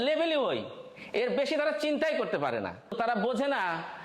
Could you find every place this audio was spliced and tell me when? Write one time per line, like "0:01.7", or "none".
0:02.9